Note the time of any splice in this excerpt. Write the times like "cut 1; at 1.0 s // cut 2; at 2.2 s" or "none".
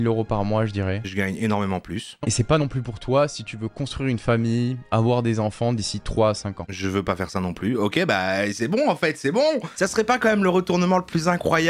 cut 1; at 9.8 s